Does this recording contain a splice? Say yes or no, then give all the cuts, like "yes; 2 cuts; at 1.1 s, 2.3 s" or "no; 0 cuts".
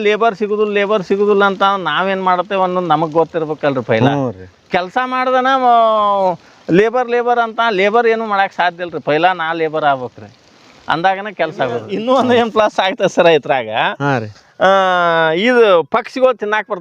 yes; 1 cut; at 11.9 s